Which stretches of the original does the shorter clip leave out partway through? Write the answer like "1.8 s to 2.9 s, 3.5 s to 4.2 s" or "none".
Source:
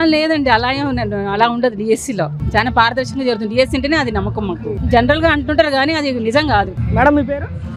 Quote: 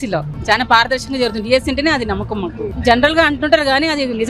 none